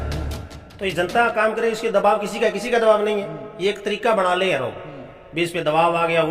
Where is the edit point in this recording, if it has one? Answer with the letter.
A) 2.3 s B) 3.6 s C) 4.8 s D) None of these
D